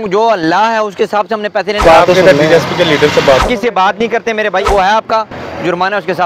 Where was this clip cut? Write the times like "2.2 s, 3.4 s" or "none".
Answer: 1.8 s, 3.4 s, 4.7 s